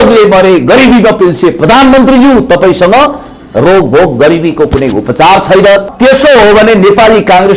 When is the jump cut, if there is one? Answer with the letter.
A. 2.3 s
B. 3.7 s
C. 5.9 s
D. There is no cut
C